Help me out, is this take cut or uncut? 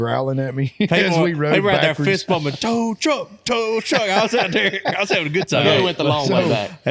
uncut